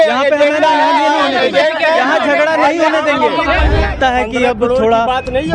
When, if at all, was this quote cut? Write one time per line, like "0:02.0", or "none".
0:03.9